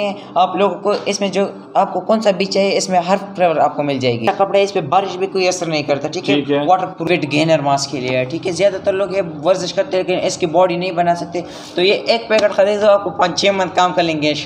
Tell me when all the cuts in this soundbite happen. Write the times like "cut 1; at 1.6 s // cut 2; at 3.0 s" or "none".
cut 1; at 4.2 s // cut 2; at 7.0 s